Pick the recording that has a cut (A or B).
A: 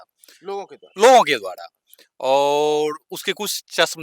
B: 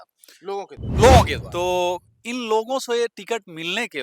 B